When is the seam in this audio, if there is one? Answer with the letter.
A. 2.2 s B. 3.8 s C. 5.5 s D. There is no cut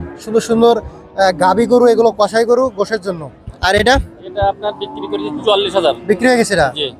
D